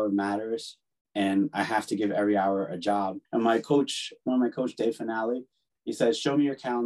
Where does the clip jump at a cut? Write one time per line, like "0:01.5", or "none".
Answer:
0:03.2